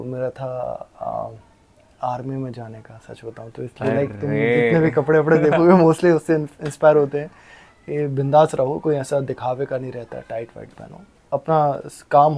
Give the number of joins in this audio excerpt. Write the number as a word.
zero